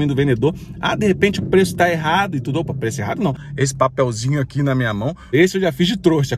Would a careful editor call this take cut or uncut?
cut